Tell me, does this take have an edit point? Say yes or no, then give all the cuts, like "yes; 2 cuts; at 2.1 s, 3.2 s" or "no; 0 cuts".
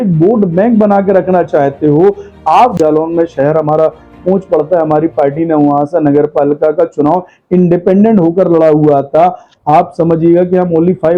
yes; 1 cut; at 2.7 s